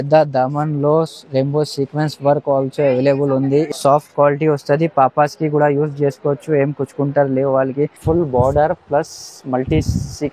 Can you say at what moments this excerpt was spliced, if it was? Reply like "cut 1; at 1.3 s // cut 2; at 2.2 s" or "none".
cut 1; at 3.7 s // cut 2; at 8.0 s